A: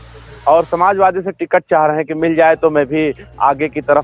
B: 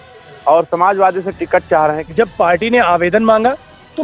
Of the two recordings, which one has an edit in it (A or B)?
B